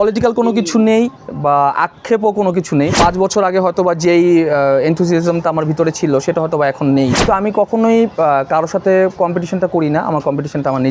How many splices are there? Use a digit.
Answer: 2